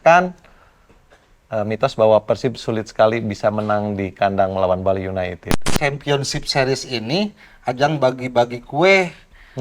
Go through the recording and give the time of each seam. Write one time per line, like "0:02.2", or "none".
0:05.6